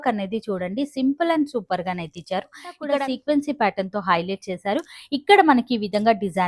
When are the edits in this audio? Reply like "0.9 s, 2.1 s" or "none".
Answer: 2.8 s

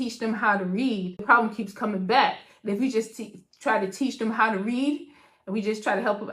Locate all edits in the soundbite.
1.2 s

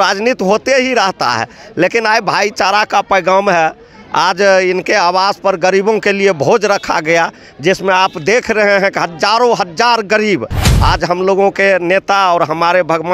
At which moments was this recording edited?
none

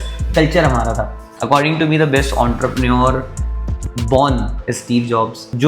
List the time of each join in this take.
1.3 s

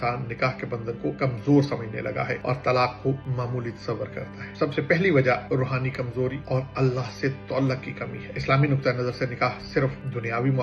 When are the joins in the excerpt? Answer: none

